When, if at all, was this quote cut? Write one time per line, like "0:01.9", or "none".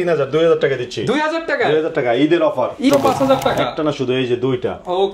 0:02.9